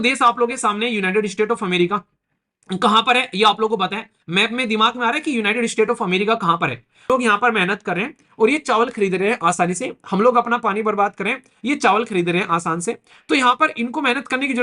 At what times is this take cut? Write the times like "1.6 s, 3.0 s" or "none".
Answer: 7.1 s